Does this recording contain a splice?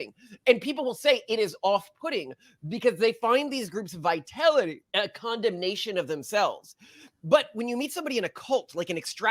yes; 1 cut; at 4.8 s

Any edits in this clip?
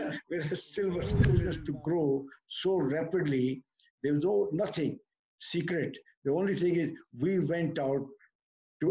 yes; 1 cut; at 1.3 s

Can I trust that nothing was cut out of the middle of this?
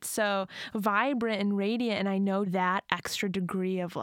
no; 1 cut; at 2.5 s

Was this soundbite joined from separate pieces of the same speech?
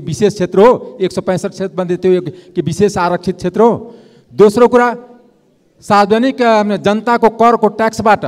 no; 0 cuts

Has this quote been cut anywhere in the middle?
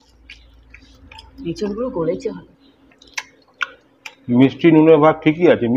no; 0 cuts

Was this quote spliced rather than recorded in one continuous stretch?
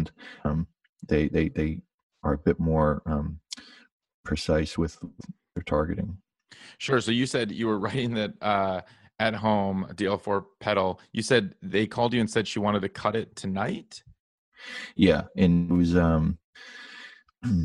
yes; 1 cut; at 6.2 s

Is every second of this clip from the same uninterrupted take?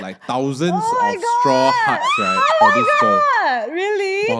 yes; 0 cuts

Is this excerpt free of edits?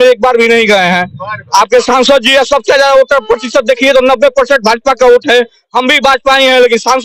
yes; 0 cuts

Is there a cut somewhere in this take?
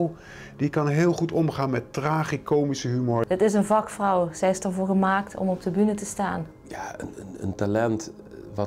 yes; 2 cuts; at 3.3 s, 6.5 s

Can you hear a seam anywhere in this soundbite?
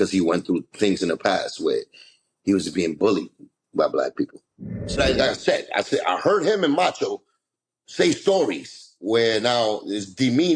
yes; 1 cut; at 5.0 s

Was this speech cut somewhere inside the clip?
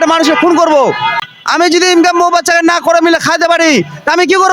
yes; 1 cut; at 1.1 s

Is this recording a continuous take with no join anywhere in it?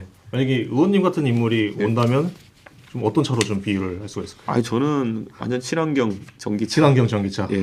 yes; 0 cuts

